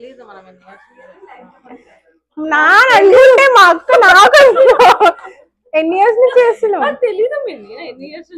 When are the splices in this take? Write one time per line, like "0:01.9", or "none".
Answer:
none